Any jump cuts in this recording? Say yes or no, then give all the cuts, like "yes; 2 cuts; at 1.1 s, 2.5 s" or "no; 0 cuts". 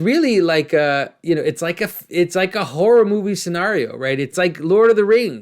yes; 1 cut; at 4.3 s